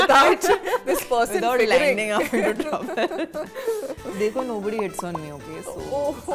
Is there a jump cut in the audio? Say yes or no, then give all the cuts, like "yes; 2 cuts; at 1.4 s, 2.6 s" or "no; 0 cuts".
no; 0 cuts